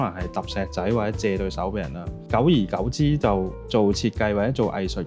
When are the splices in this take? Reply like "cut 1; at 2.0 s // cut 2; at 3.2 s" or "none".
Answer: cut 1; at 2.2 s // cut 2; at 3.6 s